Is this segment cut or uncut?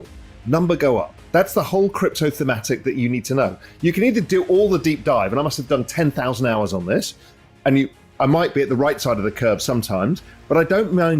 cut